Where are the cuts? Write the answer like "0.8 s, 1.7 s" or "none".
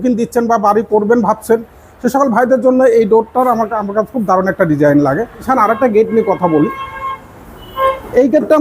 5.5 s